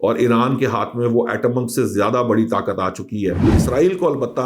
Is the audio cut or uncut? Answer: cut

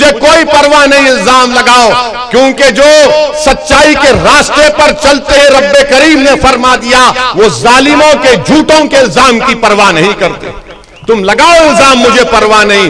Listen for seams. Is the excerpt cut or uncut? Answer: uncut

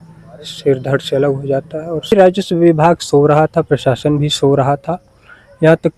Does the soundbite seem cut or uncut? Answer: cut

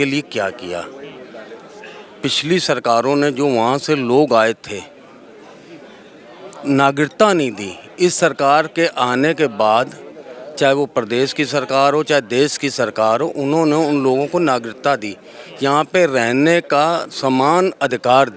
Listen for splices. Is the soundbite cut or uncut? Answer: uncut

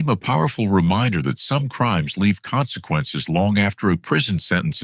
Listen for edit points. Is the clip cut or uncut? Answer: uncut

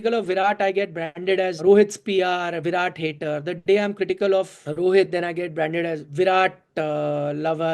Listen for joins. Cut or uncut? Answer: cut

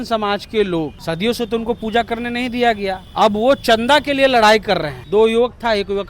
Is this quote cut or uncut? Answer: cut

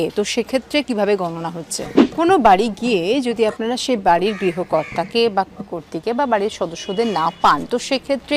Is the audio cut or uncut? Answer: cut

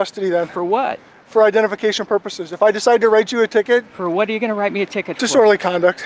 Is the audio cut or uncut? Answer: uncut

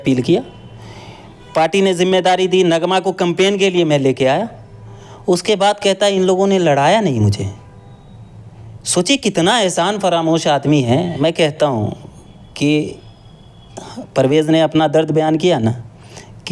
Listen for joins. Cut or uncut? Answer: uncut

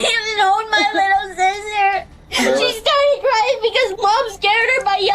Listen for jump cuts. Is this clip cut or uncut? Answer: uncut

